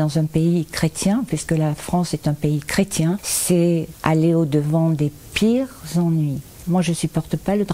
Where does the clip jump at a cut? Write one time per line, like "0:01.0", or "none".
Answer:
0:03.3
0:03.9
0:06.6